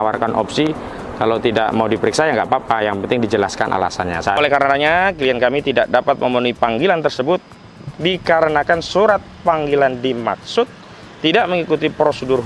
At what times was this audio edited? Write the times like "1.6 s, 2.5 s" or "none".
4.4 s